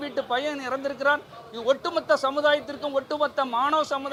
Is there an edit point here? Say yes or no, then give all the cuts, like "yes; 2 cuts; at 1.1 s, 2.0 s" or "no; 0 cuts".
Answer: no; 0 cuts